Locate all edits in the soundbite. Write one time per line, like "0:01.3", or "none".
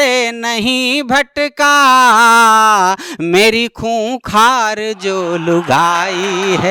none